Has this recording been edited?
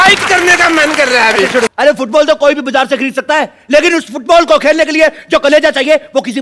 yes; 1 cut; at 1.6 s

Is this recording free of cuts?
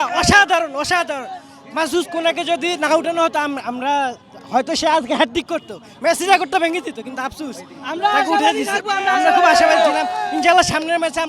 yes; 0 cuts

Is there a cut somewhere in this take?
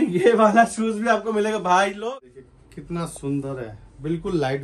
yes; 1 cut; at 2.1 s

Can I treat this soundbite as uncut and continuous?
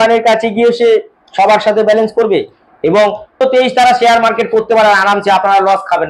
no; 1 cut; at 3.4 s

